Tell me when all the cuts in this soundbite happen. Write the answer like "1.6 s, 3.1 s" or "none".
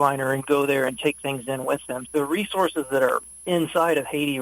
2.0 s